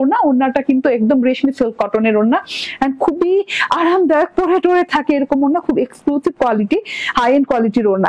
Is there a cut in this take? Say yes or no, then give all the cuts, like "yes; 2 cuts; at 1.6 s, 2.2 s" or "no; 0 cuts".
no; 0 cuts